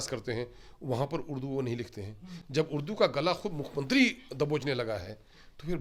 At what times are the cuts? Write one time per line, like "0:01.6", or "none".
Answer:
none